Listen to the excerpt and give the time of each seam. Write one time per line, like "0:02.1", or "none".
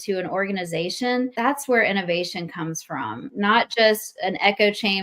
0:01.3
0:03.2